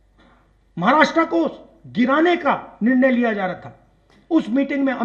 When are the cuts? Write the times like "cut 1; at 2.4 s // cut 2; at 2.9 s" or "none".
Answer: none